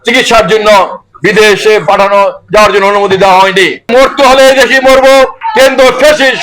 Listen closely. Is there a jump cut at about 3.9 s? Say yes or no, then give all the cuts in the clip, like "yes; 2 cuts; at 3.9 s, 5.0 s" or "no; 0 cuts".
yes; 2 cuts; at 3.9 s, 5.4 s